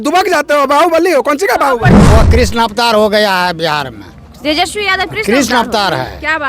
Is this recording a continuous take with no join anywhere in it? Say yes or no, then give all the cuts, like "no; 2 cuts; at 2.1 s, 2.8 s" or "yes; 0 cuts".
no; 1 cut; at 2.0 s